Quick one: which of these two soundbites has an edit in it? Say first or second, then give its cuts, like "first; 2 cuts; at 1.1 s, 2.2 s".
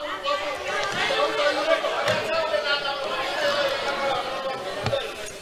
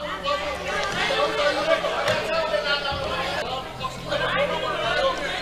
second; 1 cut; at 3.4 s